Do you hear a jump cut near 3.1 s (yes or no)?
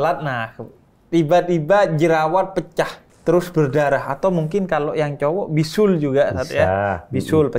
yes